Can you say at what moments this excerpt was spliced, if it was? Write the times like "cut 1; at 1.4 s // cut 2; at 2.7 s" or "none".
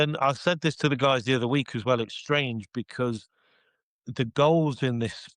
none